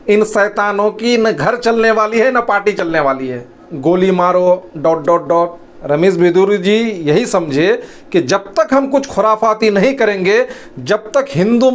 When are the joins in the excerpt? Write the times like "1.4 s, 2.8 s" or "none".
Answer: 3.7 s, 5.7 s